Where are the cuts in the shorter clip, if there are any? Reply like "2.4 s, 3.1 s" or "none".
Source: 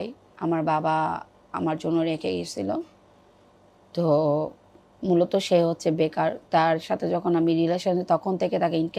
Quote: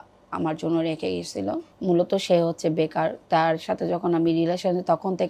1.7 s

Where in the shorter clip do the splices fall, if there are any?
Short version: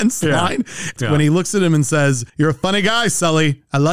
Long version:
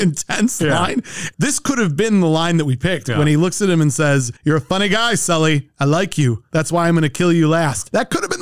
0.9 s

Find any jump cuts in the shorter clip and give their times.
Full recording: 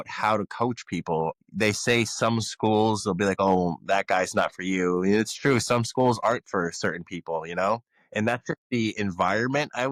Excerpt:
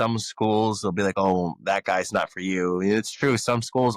none

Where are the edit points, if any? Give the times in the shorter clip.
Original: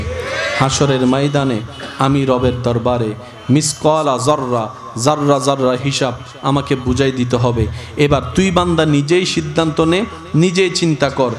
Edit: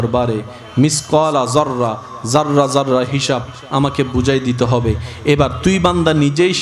none

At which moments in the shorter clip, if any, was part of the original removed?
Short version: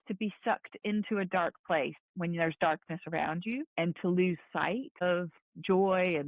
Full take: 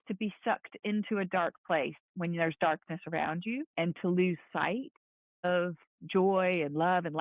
4.5 s

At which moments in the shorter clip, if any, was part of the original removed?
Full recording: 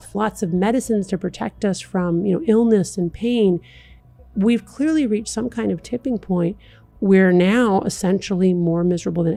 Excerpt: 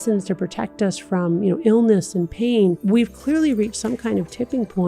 2.8 s

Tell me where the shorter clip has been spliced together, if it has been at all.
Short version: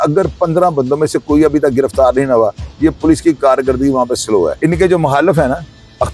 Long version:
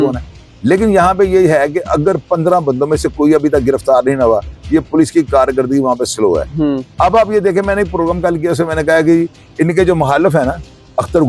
4.5 s

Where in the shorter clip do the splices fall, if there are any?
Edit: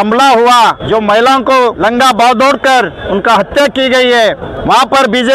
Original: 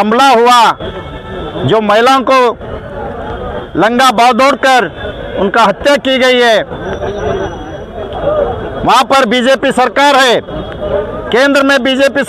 0.8 s, 1.8 s, 3.0 s, 4.5 s

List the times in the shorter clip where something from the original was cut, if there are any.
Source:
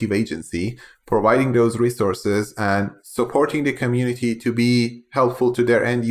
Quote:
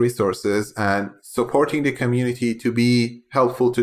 none

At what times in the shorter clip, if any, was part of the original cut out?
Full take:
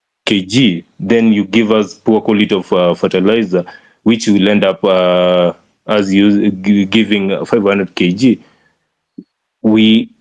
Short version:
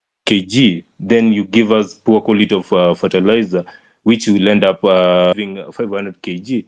5.3 s

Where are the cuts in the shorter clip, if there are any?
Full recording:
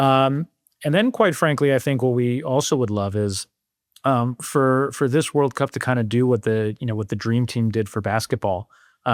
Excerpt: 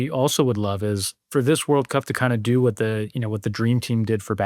1.3 s

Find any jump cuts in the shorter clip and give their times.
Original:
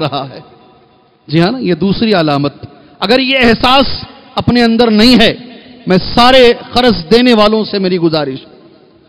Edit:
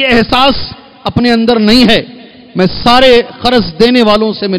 none

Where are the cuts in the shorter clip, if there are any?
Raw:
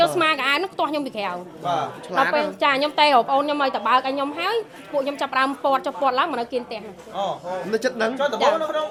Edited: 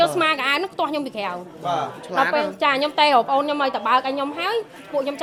none

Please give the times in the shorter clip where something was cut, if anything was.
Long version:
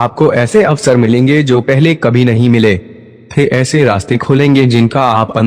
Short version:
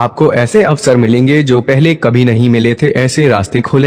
2.6 s

